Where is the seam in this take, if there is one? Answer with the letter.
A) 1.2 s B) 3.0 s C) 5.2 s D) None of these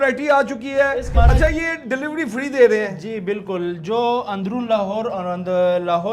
A